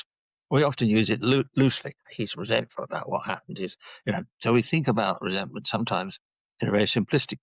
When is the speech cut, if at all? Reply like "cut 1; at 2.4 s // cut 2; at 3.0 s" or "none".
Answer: cut 1; at 2.1 s